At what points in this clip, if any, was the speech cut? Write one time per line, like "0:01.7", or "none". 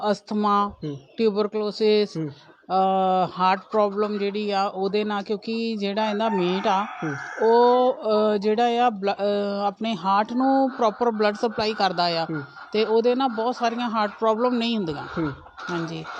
none